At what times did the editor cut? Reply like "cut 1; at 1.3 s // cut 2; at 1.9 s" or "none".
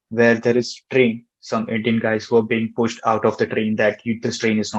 cut 1; at 1.3 s